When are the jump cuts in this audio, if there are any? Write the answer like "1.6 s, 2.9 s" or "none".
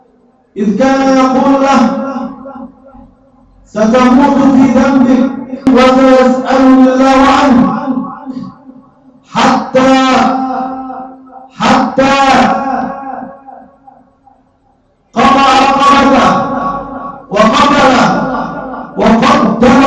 5.7 s